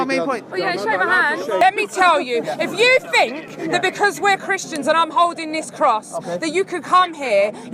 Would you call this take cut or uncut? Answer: cut